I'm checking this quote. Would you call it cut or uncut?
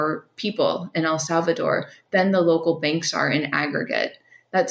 uncut